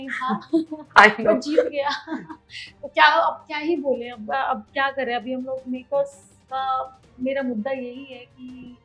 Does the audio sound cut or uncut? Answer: uncut